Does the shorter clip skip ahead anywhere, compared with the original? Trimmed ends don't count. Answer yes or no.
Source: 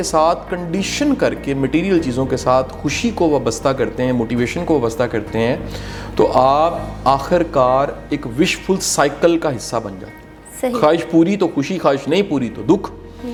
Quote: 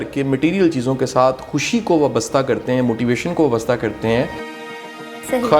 yes